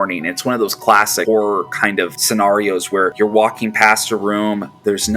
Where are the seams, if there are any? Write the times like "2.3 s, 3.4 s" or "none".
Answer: 2.2 s, 3.1 s